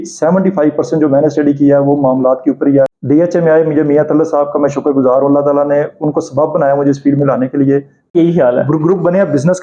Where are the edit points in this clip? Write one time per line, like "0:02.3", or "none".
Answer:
0:03.0
0:08.1